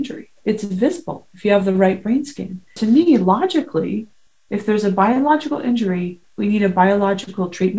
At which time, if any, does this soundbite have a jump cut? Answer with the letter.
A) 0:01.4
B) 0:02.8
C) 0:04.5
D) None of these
B